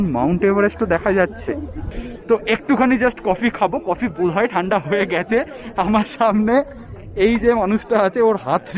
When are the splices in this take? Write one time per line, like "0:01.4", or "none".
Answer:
none